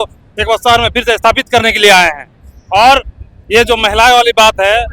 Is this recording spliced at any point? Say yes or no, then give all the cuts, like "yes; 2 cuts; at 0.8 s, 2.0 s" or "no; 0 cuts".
no; 0 cuts